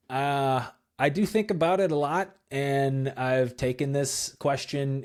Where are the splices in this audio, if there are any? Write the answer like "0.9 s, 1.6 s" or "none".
none